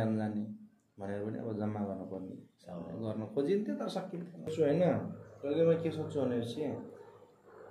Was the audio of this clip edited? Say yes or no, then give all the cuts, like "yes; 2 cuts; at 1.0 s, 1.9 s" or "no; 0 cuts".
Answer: yes; 1 cut; at 4.5 s